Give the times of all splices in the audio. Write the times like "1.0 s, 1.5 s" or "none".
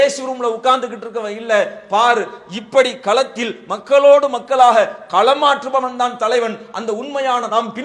none